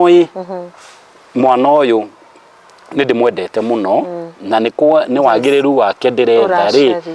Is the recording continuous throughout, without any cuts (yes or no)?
yes